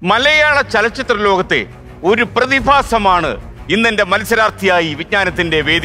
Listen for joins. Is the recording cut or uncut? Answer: uncut